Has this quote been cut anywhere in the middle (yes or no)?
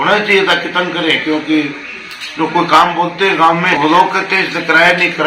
yes